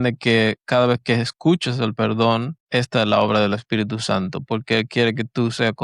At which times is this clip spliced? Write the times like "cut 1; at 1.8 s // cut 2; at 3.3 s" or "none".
cut 1; at 2.6 s